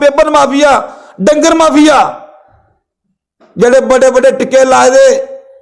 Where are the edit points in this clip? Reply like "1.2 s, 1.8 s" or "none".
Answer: none